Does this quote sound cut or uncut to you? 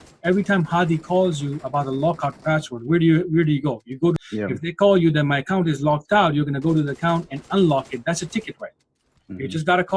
cut